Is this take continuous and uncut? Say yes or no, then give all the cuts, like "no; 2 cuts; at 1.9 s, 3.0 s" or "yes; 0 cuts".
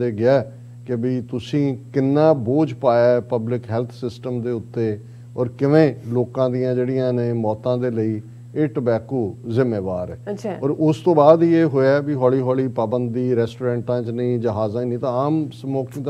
yes; 0 cuts